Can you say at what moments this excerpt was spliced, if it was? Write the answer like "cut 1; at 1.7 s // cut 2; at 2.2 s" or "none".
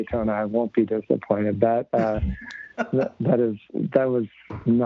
none